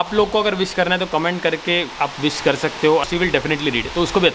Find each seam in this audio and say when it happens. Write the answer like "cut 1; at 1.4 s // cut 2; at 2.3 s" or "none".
cut 1; at 3.0 s

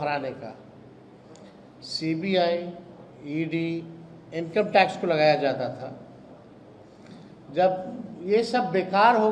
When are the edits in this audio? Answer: none

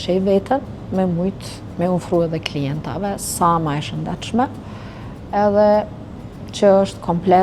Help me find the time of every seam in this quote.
none

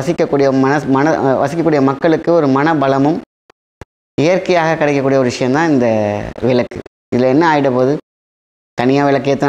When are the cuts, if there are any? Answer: none

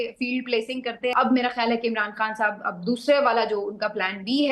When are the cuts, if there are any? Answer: cut 1; at 1.1 s

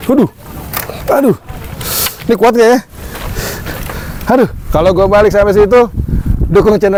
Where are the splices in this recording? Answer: none

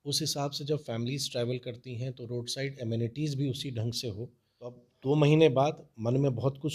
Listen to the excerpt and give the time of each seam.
cut 1; at 4.9 s

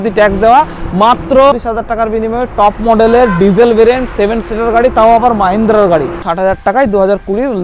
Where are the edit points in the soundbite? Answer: cut 1; at 1.6 s // cut 2; at 6.2 s

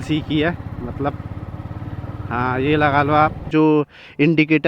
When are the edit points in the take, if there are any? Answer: cut 1; at 3.5 s

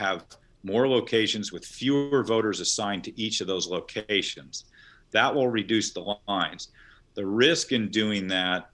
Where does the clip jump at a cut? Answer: none

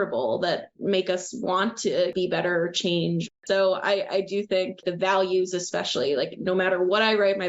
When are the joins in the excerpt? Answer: cut 1; at 2.1 s // cut 2; at 3.3 s // cut 3; at 4.8 s

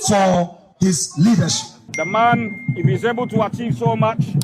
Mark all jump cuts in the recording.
cut 1; at 1.9 s

